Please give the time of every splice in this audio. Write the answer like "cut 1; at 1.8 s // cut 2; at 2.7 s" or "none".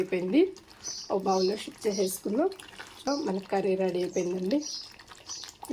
cut 1; at 3.1 s